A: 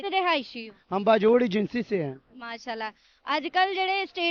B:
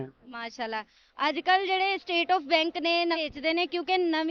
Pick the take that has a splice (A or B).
B